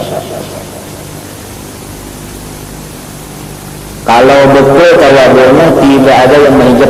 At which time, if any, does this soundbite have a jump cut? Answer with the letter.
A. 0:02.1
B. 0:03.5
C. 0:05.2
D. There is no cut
D